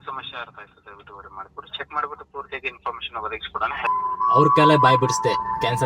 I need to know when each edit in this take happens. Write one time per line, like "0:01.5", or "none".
0:03.8